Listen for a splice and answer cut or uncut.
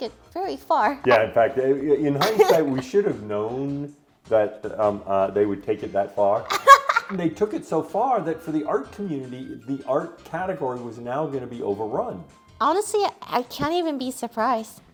uncut